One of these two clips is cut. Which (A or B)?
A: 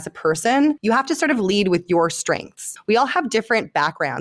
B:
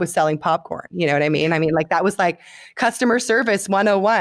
A